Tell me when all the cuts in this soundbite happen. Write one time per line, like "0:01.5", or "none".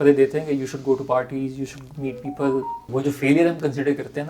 0:02.9